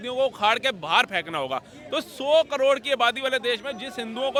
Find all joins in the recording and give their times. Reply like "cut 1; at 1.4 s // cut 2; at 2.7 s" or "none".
none